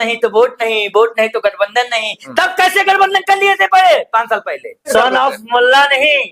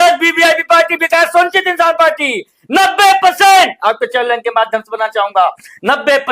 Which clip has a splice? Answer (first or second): first